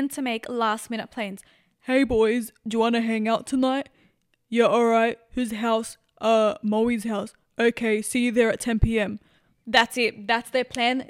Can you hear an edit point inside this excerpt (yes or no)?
no